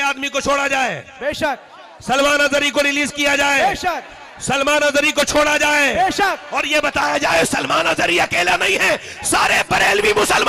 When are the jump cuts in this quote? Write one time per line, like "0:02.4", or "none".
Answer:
none